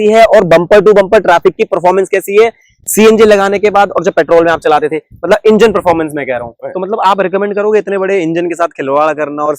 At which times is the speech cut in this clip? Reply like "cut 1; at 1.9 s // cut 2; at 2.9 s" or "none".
cut 1; at 6.5 s